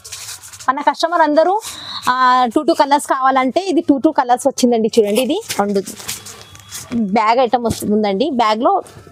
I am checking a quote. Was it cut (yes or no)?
no